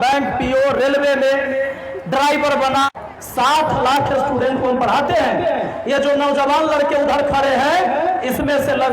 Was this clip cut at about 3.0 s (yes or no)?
yes